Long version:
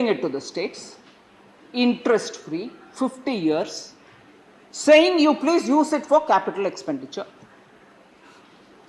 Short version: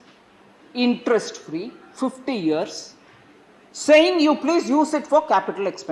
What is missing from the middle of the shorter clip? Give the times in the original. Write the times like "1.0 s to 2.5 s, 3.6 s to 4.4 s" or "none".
none